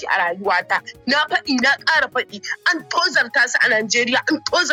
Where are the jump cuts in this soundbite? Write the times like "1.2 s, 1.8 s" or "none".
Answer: none